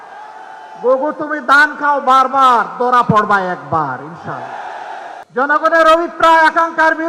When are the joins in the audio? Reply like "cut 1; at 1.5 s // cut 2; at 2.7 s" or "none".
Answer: cut 1; at 5.2 s